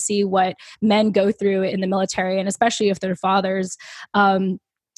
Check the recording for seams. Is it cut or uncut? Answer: uncut